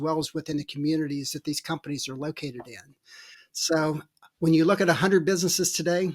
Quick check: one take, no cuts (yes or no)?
yes